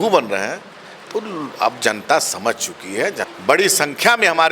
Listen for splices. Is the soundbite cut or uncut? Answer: cut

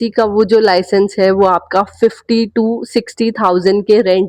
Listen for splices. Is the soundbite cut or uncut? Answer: uncut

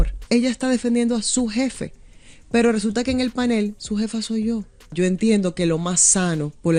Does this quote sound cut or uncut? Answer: uncut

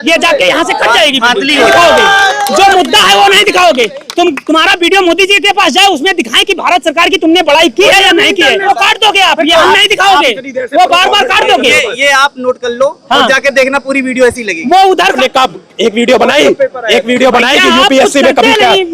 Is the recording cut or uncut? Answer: cut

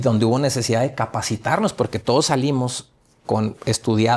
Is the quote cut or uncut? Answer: uncut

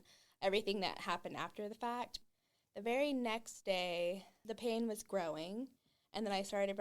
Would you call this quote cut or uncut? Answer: cut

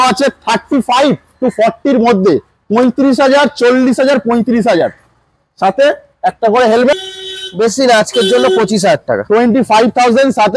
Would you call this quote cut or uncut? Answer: cut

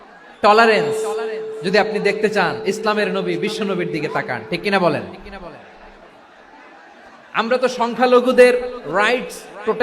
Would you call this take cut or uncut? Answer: uncut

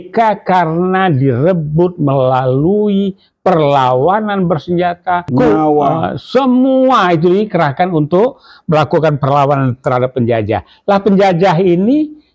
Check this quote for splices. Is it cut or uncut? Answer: cut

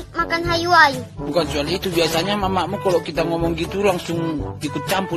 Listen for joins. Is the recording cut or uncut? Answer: uncut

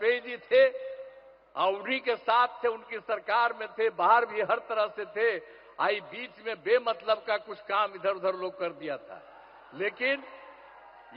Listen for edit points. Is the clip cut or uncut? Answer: uncut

